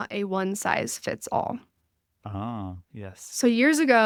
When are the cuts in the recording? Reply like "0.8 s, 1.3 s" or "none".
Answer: none